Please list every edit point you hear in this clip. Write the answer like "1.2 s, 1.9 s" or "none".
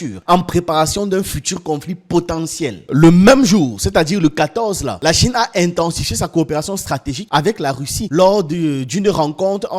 2.8 s